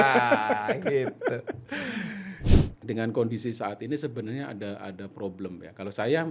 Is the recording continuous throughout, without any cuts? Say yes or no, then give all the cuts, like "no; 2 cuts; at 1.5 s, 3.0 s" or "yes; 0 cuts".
no; 1 cut; at 2.4 s